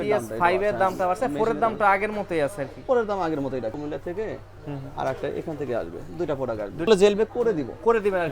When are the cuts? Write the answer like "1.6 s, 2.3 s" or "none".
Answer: 3.8 s, 6.9 s